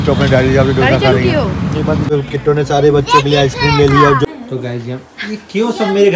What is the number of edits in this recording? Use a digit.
2